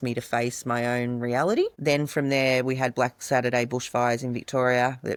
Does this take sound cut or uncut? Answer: uncut